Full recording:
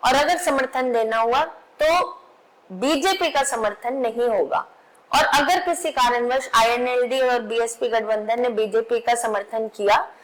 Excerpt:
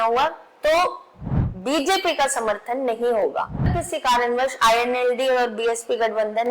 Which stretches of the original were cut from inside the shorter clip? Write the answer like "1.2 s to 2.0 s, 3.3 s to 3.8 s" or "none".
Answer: 5.0 s to 5.7 s